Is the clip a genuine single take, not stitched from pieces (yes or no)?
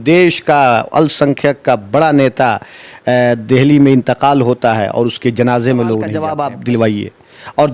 no